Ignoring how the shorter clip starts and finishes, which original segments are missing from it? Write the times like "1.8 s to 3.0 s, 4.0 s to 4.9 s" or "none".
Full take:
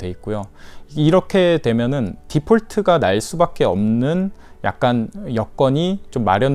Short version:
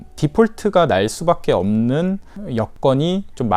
4.6 s to 5.3 s